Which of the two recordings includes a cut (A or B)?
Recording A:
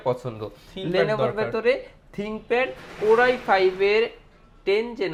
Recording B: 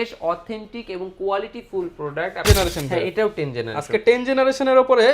B